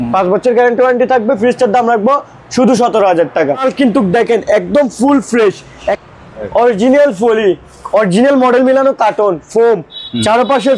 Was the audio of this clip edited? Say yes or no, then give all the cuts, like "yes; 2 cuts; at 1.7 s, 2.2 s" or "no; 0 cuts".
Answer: yes; 2 cuts; at 3.6 s, 6.0 s